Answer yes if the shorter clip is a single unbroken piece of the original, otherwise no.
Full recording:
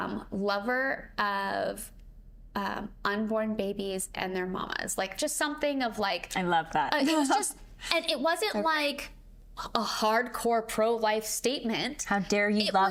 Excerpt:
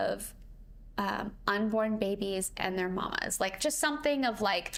yes